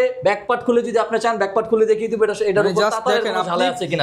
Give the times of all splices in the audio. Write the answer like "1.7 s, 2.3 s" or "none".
none